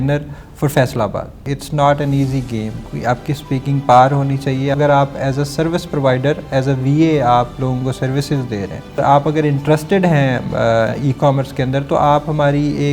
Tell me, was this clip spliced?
yes; 4 cuts; at 1.5 s, 2.9 s, 4.7 s, 9.0 s

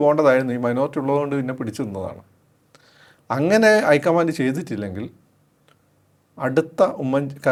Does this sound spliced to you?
no; 0 cuts

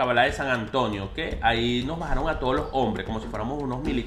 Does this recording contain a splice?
no; 0 cuts

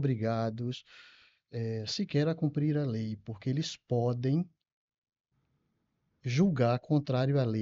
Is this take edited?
no; 0 cuts

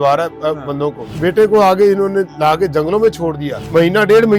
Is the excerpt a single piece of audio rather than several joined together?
yes; 0 cuts

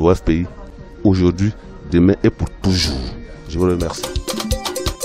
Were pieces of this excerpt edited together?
yes; 1 cut; at 4.0 s

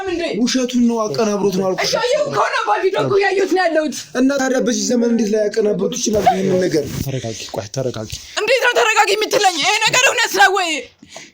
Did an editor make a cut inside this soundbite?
no; 0 cuts

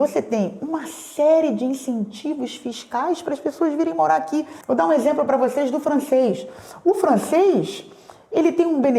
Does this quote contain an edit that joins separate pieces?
no; 0 cuts

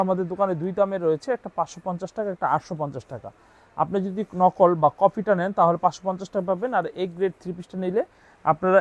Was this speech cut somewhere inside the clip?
no; 0 cuts

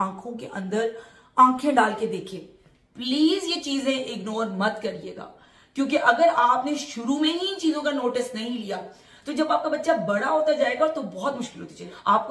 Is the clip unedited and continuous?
yes; 0 cuts

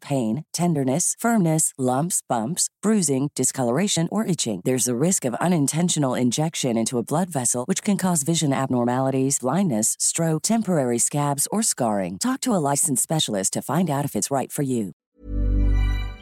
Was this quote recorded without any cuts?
no; 1 cut; at 15.0 s

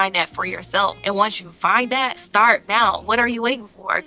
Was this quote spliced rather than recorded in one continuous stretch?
yes; 3 cuts; at 1.0 s, 2.2 s, 3.0 s

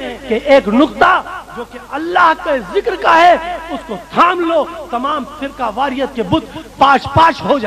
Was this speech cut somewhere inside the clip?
no; 0 cuts

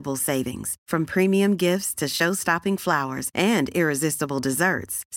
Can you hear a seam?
no; 0 cuts

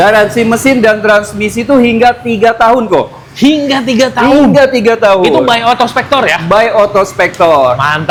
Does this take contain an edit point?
no; 0 cuts

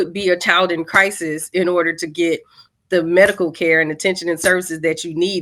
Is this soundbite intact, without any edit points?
yes; 0 cuts

